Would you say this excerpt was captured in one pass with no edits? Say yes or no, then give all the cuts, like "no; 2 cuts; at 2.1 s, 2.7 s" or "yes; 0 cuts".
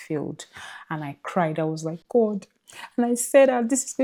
yes; 0 cuts